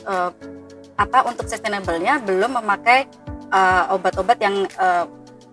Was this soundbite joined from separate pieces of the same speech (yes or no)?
no